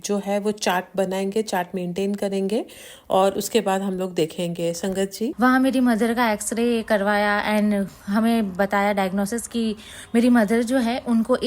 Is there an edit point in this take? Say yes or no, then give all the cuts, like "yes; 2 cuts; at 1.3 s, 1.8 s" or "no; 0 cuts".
yes; 1 cut; at 5.3 s